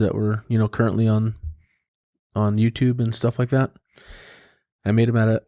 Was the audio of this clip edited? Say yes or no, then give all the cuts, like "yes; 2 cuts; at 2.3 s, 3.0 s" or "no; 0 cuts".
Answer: no; 0 cuts